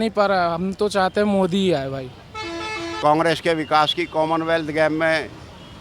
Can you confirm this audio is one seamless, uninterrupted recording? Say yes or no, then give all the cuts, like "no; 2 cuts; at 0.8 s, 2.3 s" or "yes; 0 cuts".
no; 1 cut; at 2.8 s